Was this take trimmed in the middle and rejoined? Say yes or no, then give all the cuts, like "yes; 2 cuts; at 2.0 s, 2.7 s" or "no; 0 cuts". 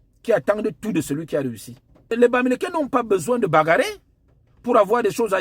yes; 1 cut; at 2.1 s